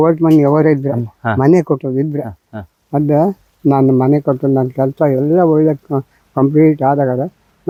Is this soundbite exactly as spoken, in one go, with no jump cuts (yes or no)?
yes